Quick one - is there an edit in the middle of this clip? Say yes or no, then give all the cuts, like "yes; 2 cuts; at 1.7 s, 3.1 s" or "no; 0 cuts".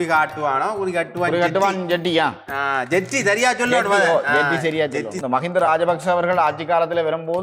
yes; 1 cut; at 5.1 s